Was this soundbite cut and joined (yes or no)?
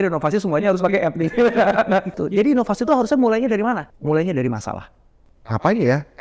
yes